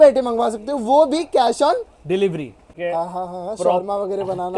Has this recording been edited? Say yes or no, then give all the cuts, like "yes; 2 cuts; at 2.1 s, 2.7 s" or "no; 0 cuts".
yes; 1 cut; at 2.7 s